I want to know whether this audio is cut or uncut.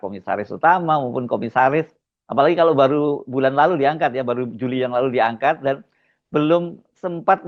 uncut